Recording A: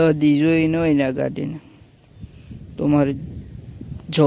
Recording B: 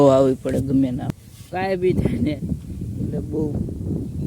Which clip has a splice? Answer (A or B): B